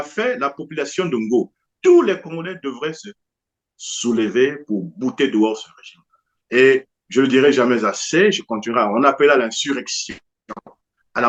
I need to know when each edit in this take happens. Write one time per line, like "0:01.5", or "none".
none